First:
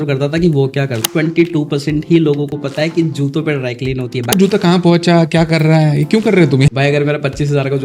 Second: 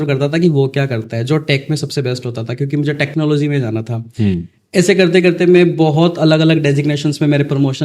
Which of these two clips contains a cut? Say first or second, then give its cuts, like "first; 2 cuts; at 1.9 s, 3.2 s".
first; 3 cuts; at 1.1 s, 4.3 s, 6.7 s